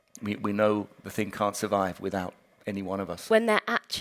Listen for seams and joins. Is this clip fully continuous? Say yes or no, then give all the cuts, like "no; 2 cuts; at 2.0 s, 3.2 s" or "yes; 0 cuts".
no; 2 cuts; at 0.9 s, 3.3 s